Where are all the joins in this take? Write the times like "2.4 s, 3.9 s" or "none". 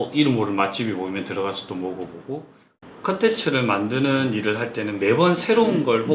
2.7 s